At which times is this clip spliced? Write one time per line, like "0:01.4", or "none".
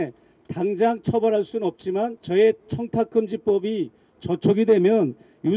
0:02.2

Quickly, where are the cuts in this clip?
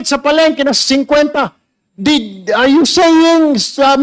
none

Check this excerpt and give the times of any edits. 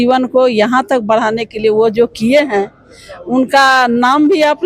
none

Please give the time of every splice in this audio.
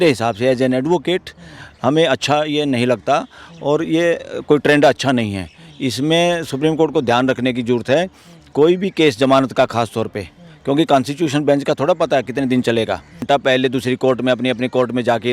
0:13.2

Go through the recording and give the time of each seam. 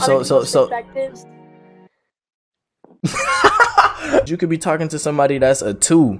0:04.3

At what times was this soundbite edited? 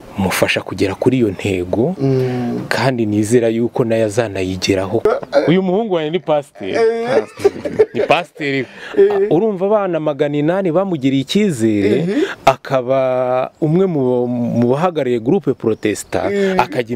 0:05.1

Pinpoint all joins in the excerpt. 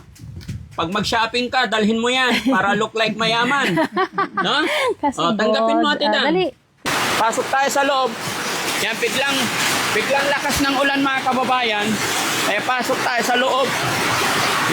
0:06.8

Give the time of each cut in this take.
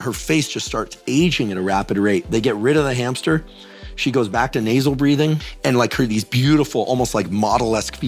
0:05.4

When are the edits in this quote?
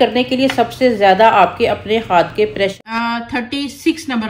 0:02.7

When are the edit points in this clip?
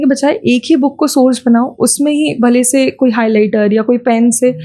none

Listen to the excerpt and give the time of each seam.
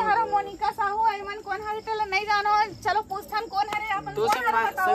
none

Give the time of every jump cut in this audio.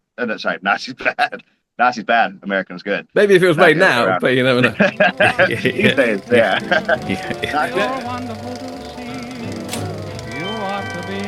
0:07.7

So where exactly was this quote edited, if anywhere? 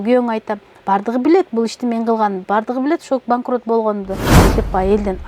0:04.4

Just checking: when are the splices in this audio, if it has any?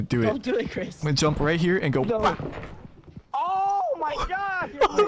none

